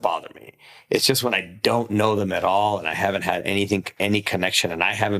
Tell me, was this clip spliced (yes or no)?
no